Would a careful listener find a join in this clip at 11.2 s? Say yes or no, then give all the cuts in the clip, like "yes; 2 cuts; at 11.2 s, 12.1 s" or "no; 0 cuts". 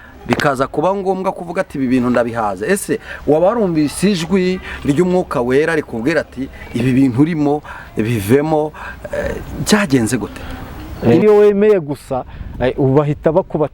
yes; 1 cut; at 11.2 s